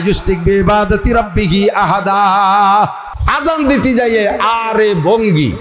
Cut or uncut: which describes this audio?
cut